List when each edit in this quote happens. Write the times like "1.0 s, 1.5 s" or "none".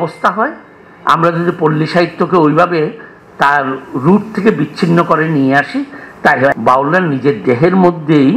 6.5 s